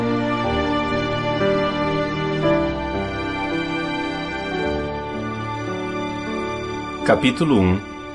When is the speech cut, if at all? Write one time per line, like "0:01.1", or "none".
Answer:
0:07.0

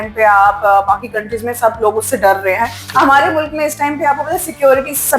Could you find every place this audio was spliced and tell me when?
0:02.8

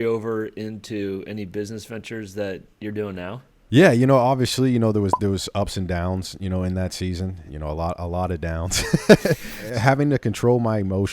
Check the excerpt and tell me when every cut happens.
0:03.5
0:07.4
0:09.6

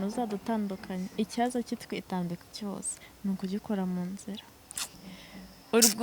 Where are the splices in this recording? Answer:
0:04.9

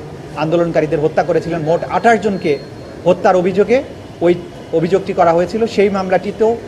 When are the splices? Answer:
none

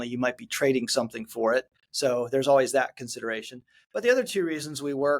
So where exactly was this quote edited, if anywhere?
0:01.8

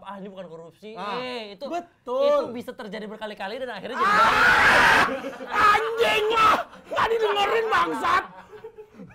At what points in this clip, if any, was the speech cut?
none

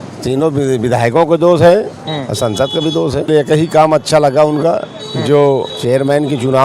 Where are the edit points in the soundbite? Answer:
0:03.3
0:05.7

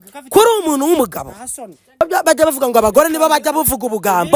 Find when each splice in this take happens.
0:02.0

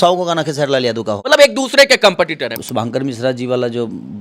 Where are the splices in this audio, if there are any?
0:01.2
0:02.6

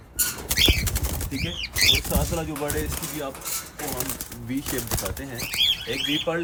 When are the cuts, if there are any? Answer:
none

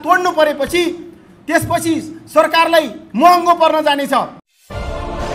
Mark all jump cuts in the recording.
none

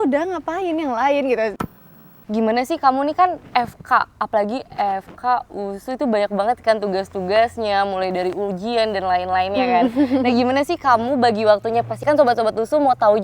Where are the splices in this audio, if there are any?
0:01.6

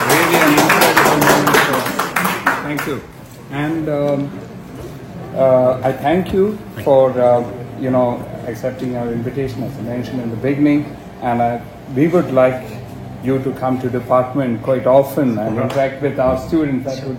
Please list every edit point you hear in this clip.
none

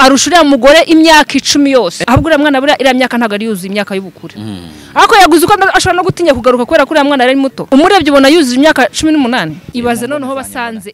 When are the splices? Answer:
0:02.0
0:07.6
0:09.6

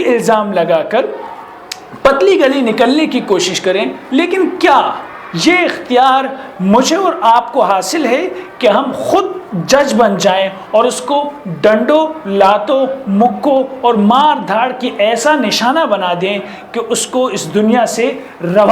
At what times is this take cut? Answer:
0:04.0

